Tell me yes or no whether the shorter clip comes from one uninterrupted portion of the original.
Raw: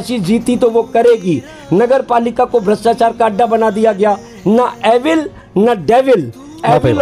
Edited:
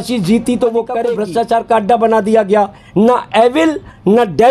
no